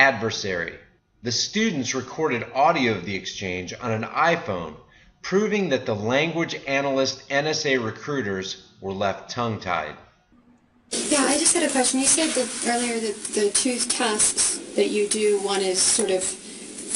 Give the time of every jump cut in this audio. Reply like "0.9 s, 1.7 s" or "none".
13.9 s